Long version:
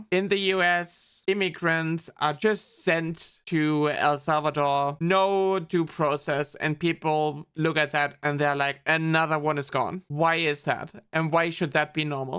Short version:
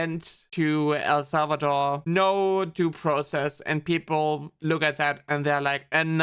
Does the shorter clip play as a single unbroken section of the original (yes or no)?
yes